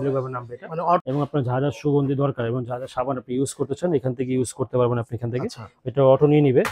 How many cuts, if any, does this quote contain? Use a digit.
1